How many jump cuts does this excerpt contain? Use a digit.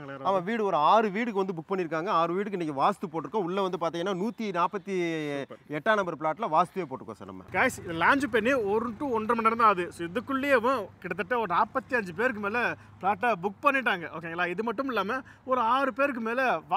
0